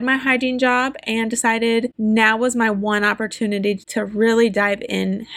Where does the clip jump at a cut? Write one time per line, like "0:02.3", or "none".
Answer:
0:01.9
0:03.9